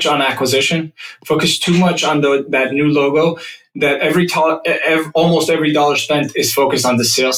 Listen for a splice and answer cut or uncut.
uncut